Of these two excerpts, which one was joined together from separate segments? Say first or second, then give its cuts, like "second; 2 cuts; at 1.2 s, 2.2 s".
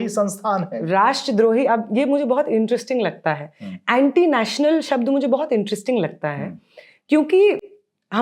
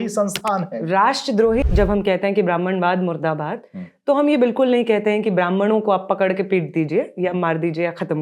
second; 1 cut; at 1.6 s